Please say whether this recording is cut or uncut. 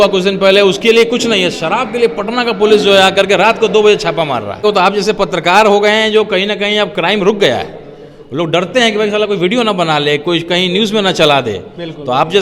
cut